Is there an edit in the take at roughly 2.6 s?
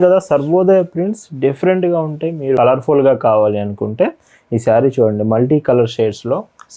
yes; 1 cut; at 2.6 s

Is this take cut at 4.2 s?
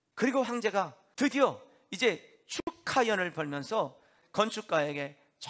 yes; 2 cuts; at 1.0 s, 4.2 s

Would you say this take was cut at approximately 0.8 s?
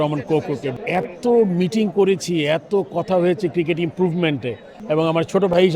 yes; 2 cuts; at 0.8 s, 4.7 s

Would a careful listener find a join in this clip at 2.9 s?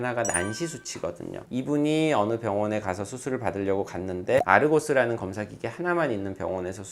no; 2 cuts; at 1.3 s, 4.4 s

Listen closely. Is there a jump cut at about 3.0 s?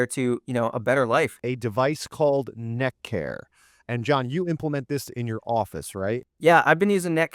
no; 1 cut; at 1.4 s

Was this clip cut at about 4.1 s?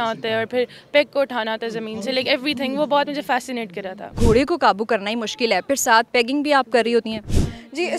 yes; 1 cut; at 4.1 s

